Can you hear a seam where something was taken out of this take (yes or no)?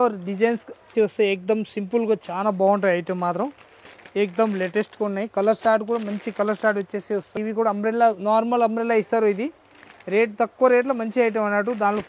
yes